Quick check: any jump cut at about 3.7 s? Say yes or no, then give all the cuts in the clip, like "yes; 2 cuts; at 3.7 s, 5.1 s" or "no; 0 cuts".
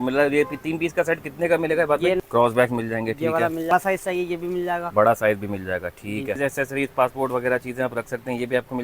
yes; 3 cuts; at 2.2 s, 3.7 s, 6.4 s